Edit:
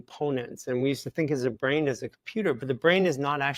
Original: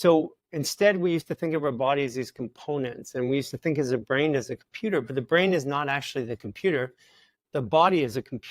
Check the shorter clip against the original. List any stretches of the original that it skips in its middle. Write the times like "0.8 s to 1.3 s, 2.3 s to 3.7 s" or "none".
none